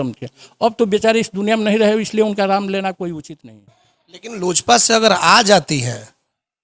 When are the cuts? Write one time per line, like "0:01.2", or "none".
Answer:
0:03.3